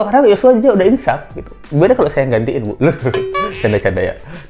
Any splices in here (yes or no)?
no